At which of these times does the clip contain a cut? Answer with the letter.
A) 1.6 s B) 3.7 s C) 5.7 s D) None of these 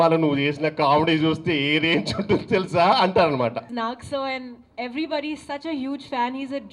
B